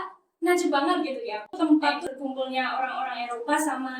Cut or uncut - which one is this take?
cut